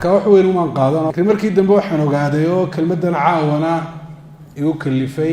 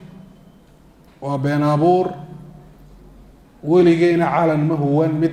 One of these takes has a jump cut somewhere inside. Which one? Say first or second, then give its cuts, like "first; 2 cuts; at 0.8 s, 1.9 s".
first; 1 cut; at 1.1 s